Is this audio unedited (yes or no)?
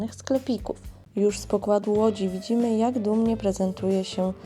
no